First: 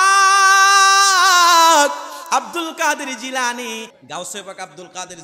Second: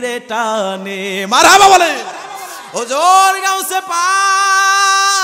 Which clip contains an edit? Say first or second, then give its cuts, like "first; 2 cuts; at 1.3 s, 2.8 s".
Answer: first; 1 cut; at 3.9 s